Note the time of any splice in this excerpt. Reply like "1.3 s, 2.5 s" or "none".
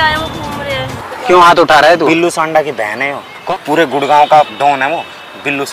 1.1 s, 3.3 s, 4.5 s